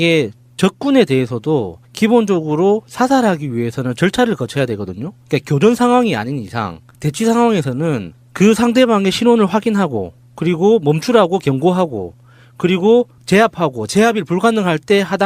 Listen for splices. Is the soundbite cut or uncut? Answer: uncut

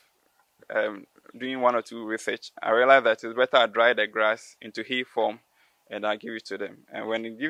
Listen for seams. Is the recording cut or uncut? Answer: uncut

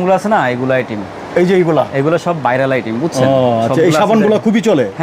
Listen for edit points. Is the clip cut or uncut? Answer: uncut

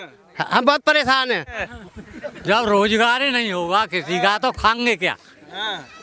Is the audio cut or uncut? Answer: cut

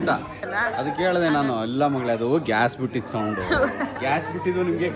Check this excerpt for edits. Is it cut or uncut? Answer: cut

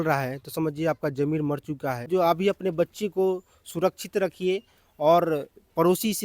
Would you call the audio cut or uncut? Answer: cut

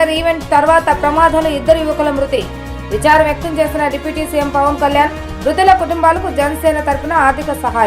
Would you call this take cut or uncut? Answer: uncut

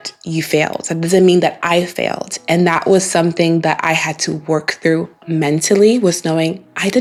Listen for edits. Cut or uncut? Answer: uncut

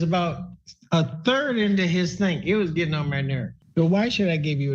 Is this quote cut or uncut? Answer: cut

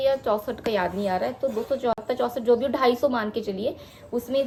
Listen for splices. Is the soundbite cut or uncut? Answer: uncut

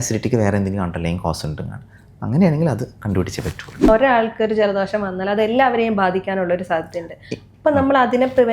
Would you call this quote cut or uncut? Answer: cut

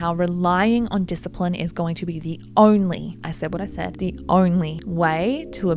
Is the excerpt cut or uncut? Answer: uncut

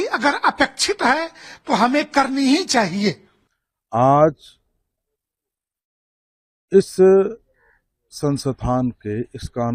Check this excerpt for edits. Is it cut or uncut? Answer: uncut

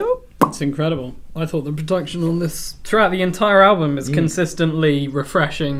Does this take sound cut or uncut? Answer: uncut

